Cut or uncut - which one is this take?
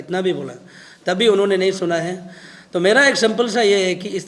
uncut